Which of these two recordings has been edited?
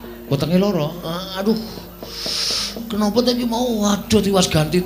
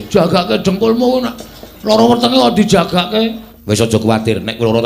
second; 1 cut; at 3.5 s

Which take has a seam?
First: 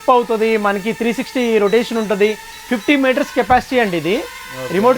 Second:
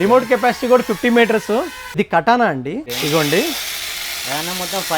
second; 2 cuts; at 1.8 s, 2.9 s

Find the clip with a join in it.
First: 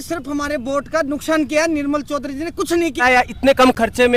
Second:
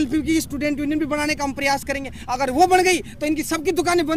first; 1 cut; at 3.0 s

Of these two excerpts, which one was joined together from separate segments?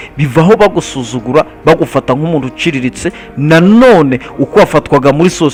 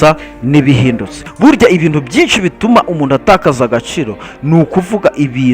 second; 1 cut; at 1.1 s

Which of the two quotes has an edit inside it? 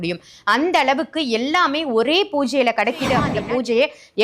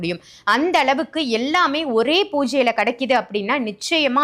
first; 1 cut; at 3.3 s

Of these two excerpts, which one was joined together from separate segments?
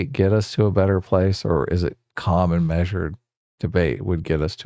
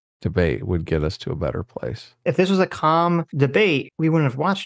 second; 2 cuts; at 2.2 s, 3.8 s

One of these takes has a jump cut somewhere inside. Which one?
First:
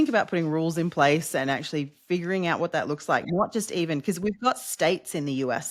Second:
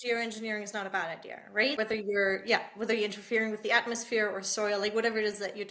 second; 1 cut; at 1.8 s

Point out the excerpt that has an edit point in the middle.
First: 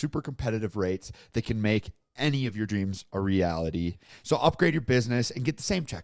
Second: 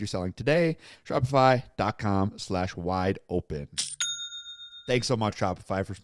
first; 1 cut; at 4.0 s

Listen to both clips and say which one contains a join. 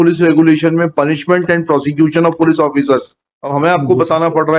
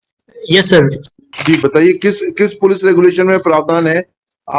second; 1 cut; at 1.3 s

